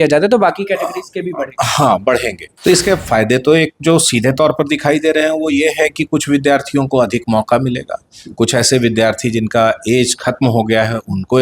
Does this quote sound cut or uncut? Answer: cut